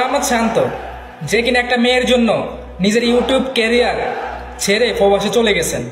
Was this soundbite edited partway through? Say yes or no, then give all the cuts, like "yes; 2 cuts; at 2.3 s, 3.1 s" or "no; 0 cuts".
no; 0 cuts